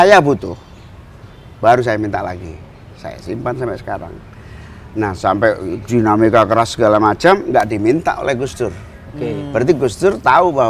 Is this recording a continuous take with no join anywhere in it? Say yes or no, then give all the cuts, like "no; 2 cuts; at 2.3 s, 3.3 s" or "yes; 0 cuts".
yes; 0 cuts